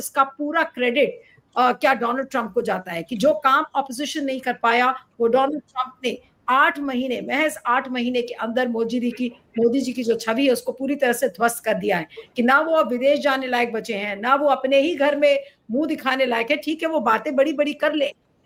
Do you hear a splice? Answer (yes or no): no